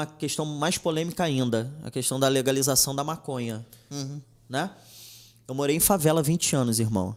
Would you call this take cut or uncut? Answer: uncut